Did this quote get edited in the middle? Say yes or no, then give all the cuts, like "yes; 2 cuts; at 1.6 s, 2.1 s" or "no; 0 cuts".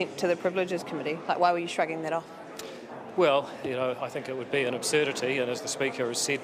no; 0 cuts